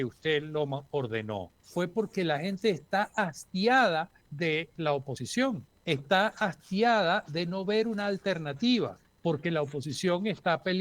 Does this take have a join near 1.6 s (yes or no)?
yes